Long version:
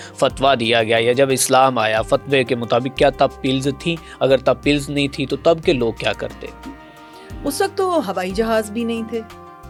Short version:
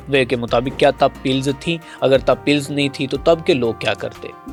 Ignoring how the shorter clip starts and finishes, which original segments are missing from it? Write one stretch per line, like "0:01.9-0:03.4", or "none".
none